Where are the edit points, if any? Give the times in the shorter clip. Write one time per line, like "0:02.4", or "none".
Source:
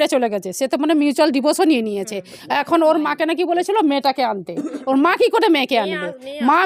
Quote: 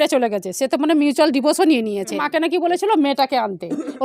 0:02.2